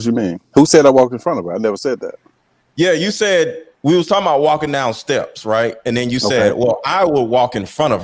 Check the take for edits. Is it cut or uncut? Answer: uncut